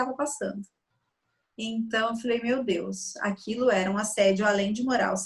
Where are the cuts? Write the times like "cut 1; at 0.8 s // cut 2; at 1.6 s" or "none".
none